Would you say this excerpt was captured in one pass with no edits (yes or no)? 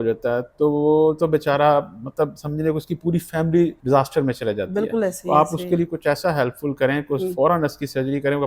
no